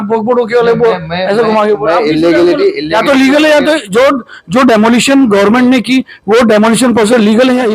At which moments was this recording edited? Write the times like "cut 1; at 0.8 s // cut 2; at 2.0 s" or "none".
none

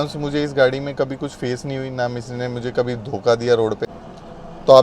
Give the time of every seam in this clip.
cut 1; at 3.9 s

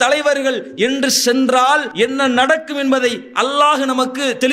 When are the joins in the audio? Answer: cut 1; at 1.9 s

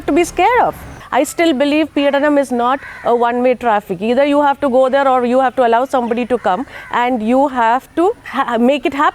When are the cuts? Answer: cut 1; at 1.0 s // cut 2; at 8.2 s

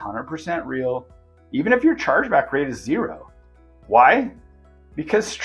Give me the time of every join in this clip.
none

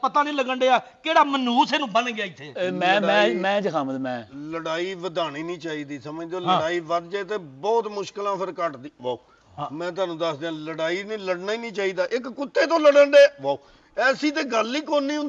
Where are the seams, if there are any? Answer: none

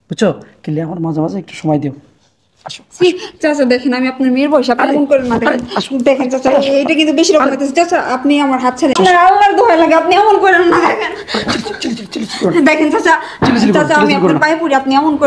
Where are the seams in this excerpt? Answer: cut 1; at 9.0 s

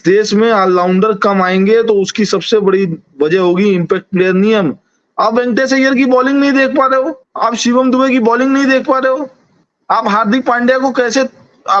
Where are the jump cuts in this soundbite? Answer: cut 1; at 7.2 s

